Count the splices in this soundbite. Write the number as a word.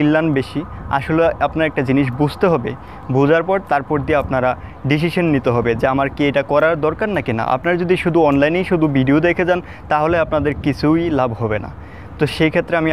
zero